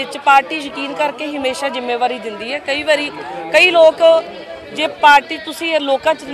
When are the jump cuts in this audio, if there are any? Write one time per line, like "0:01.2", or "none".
0:05.4